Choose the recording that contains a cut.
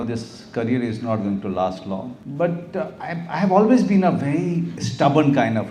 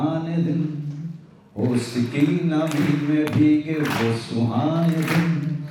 first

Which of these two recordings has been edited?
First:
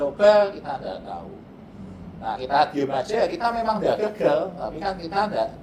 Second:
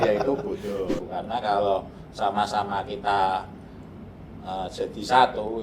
second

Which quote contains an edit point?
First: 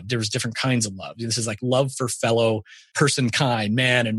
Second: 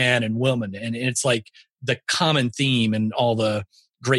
first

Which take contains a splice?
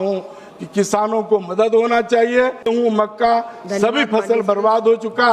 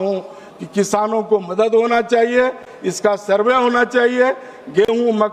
first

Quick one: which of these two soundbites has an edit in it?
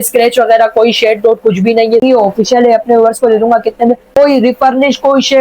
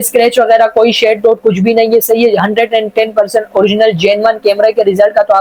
first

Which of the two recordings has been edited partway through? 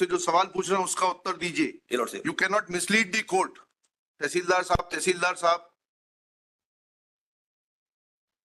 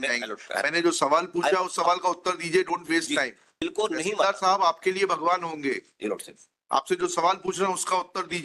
second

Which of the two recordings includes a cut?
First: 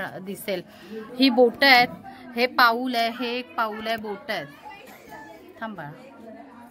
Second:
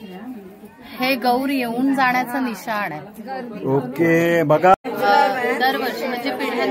second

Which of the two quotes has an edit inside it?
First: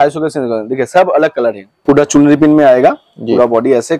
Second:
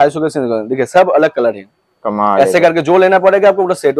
first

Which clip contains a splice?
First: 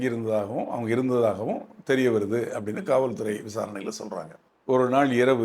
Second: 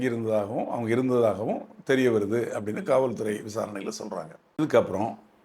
first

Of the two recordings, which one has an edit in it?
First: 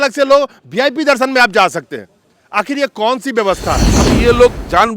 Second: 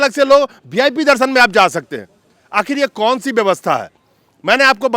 first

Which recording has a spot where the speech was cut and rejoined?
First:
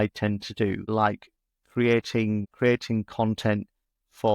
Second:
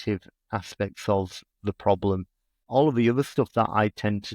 second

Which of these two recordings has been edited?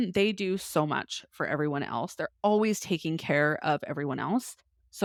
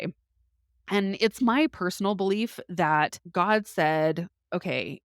second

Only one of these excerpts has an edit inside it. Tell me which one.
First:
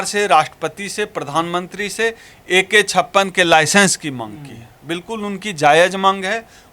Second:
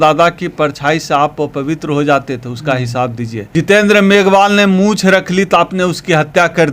second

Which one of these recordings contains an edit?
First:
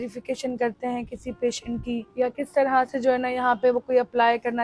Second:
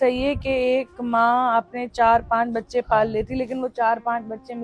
first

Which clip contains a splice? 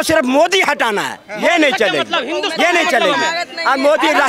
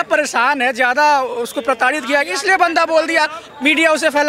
second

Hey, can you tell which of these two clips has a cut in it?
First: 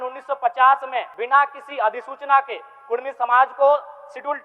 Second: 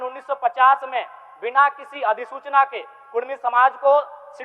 first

